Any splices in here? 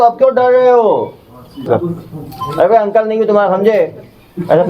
yes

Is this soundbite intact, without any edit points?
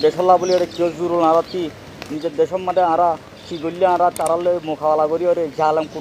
yes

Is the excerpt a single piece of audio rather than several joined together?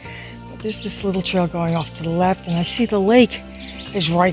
yes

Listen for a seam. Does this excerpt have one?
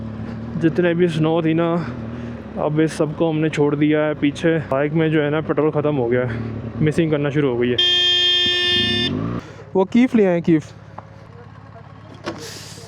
yes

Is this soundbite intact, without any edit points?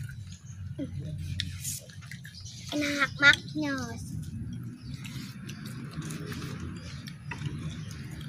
yes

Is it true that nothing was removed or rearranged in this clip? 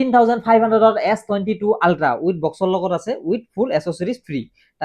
yes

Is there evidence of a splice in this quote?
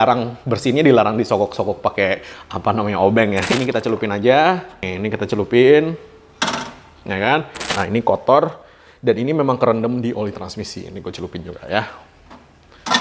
yes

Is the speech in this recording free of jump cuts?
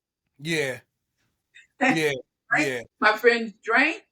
no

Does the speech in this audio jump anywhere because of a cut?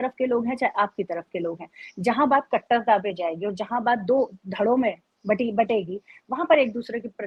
no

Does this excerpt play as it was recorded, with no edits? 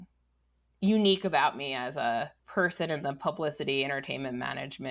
no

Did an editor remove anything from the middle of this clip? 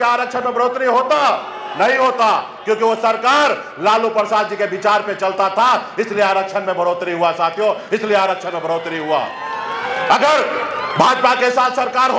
no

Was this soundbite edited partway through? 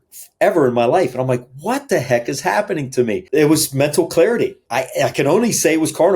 yes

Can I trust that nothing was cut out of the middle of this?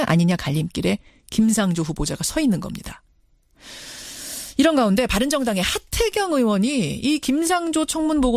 yes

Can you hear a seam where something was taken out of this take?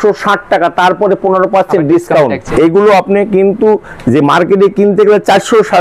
yes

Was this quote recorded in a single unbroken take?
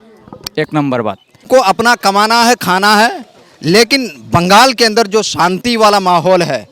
no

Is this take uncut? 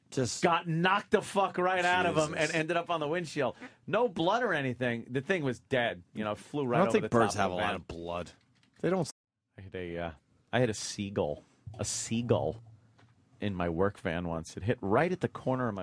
yes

